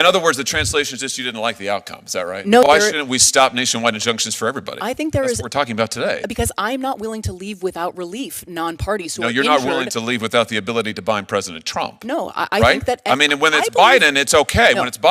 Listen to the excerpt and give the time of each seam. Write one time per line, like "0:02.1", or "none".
0:02.6